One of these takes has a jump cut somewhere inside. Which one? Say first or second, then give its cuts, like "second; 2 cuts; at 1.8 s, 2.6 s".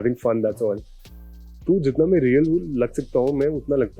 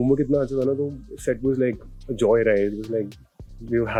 first; 1 cut; at 0.9 s